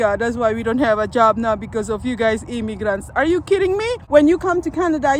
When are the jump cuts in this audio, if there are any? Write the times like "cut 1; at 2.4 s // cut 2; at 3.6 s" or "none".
cut 1; at 4.0 s

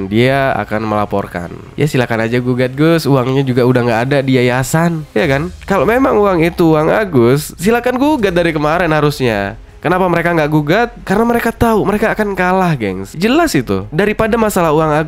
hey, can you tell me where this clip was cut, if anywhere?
cut 1; at 5.1 s // cut 2; at 13.9 s

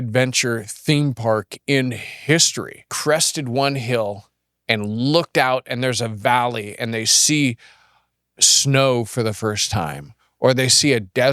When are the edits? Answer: cut 1; at 2.9 s

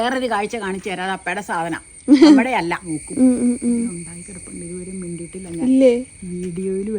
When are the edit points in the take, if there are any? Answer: cut 1; at 2.9 s

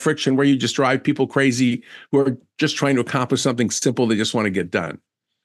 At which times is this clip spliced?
none

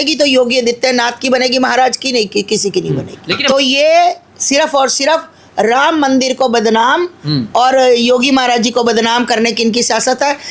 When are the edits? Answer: cut 1; at 3.4 s

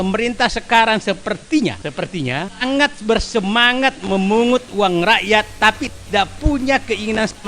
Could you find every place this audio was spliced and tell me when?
cut 1; at 2.2 s

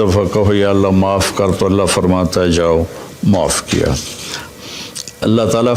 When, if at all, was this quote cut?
cut 1; at 4.5 s

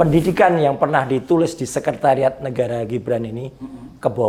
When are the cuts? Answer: none

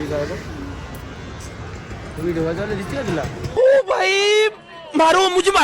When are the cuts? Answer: cut 1; at 3.4 s

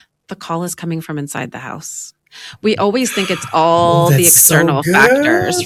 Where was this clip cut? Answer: none

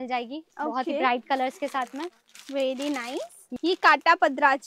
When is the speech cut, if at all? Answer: cut 1; at 3.4 s

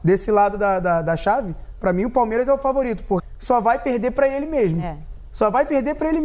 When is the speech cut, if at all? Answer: cut 1; at 3.2 s

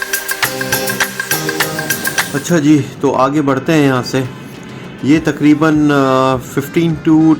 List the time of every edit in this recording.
cut 1; at 2.2 s

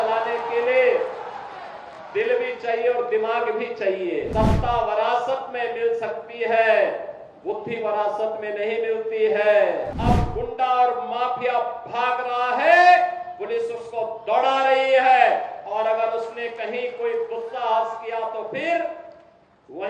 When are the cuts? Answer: cut 1; at 4.3 s // cut 2; at 9.9 s

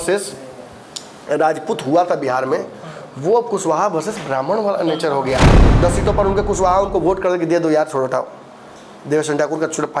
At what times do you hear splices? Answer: cut 1; at 5.6 s

